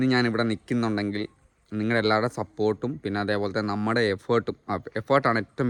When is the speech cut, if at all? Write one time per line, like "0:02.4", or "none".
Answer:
none